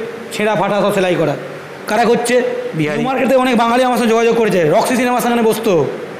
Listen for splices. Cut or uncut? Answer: cut